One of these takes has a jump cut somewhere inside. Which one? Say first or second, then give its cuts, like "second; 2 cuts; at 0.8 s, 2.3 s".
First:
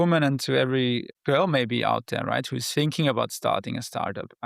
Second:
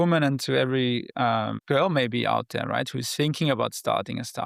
first; 1 cut; at 1.1 s